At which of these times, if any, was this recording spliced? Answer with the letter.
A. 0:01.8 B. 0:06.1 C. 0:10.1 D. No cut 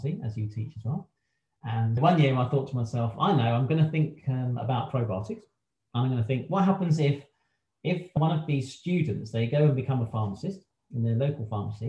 A